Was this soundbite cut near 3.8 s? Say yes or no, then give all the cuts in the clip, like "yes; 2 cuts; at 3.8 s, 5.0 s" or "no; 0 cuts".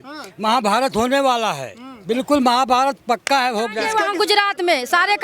yes; 1 cut; at 3.8 s